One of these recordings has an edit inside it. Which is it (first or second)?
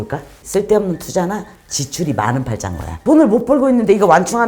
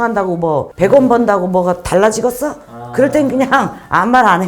first